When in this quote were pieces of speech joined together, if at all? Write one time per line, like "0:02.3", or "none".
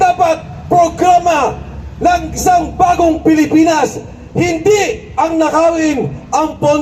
none